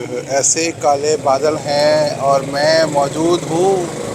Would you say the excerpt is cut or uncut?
uncut